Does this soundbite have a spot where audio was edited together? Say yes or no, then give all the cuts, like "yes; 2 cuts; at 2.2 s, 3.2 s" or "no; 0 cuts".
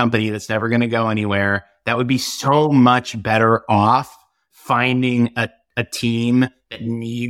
no; 0 cuts